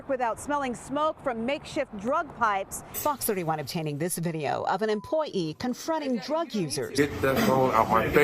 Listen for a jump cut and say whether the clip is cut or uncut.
cut